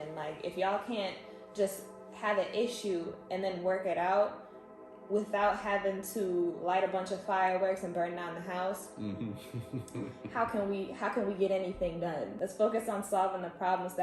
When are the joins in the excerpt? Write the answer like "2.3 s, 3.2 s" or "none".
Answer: 12.4 s